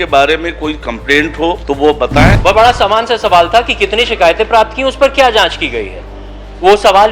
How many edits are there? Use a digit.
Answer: 1